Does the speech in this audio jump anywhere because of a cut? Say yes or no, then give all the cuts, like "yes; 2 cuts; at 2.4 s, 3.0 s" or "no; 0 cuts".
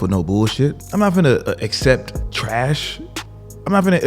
yes; 2 cuts; at 0.8 s, 2.2 s